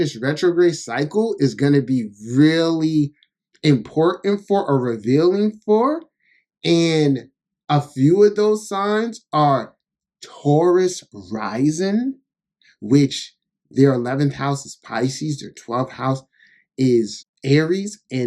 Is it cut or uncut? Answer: uncut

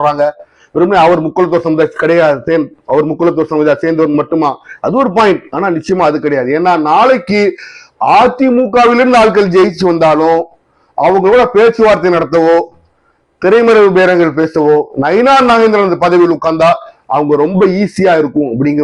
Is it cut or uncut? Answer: uncut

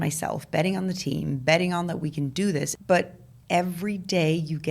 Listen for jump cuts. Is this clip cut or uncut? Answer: cut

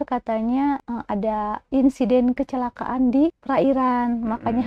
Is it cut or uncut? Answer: cut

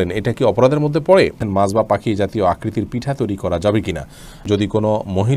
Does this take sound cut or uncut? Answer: cut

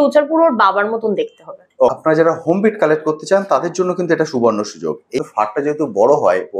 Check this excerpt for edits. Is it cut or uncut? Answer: cut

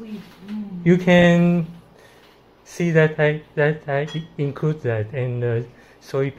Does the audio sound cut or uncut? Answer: uncut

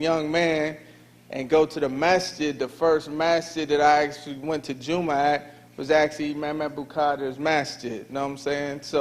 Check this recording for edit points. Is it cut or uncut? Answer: cut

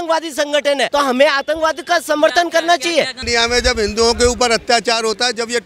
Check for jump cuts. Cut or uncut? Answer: uncut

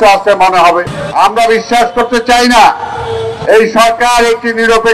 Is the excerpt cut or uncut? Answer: cut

